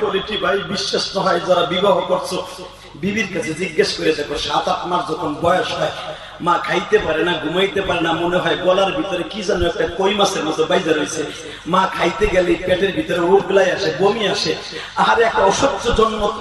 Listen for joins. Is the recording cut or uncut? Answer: uncut